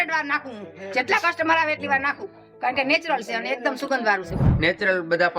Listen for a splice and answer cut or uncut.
cut